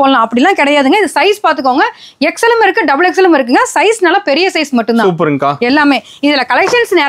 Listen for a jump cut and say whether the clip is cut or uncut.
uncut